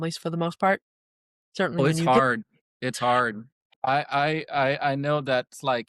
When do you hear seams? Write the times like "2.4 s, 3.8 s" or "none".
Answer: 3.8 s

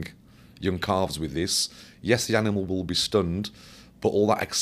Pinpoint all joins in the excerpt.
none

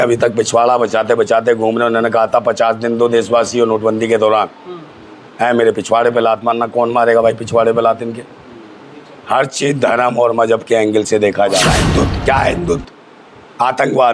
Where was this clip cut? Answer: 11.7 s

